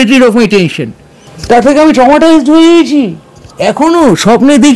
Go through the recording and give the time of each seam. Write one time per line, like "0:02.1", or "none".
0:01.3